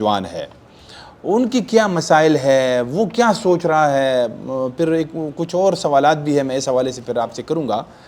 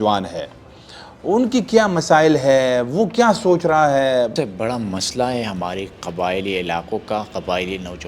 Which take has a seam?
second; 1 cut; at 4.3 s

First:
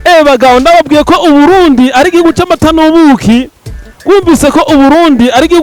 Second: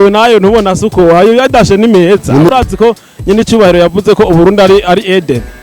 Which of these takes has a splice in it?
second; 1 cut; at 2.5 s

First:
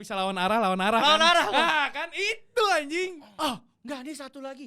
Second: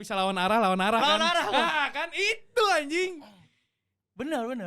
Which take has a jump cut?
first; 1 cut; at 3.2 s

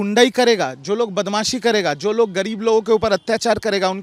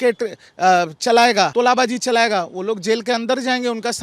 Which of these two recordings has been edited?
second; 1 cut; at 1.5 s

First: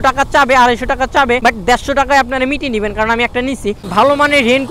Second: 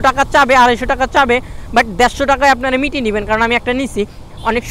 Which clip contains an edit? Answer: first; 2 cuts; at 1.4 s, 3.8 s

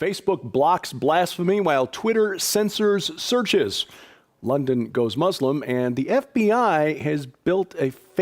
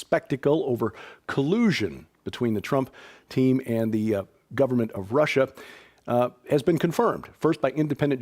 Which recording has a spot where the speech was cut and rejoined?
second; 1 cut; at 3.3 s

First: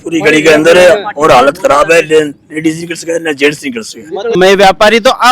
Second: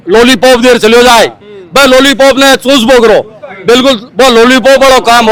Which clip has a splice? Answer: first; 1 cut; at 4.4 s

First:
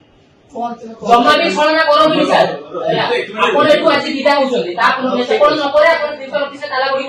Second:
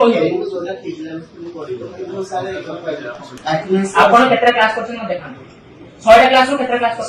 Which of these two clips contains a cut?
second; 1 cut; at 3.3 s

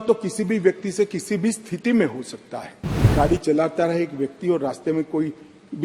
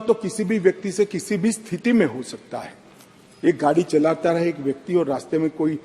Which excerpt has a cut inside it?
first; 1 cut; at 3.1 s

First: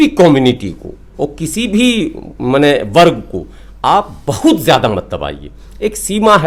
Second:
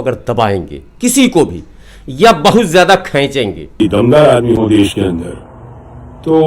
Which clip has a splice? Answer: second; 1 cut; at 3.6 s

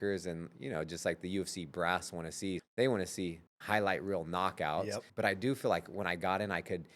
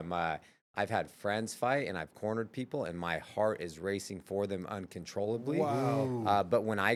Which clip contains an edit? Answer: first; 3 cuts; at 2.6 s, 3.5 s, 5.1 s

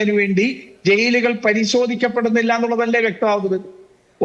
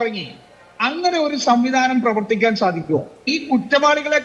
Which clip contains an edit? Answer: second; 1 cut; at 3.3 s

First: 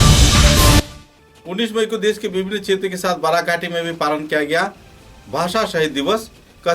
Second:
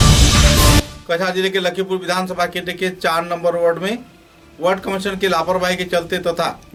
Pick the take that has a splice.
first; 1 cut; at 0.9 s

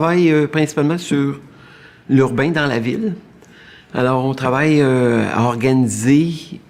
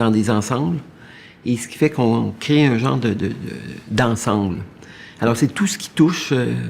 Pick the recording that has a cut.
second; 1 cut; at 5.1 s

